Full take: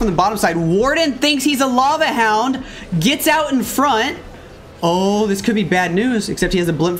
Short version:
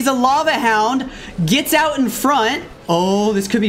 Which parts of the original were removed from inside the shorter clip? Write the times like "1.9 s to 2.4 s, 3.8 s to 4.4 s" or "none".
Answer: 4.2 s to 4.6 s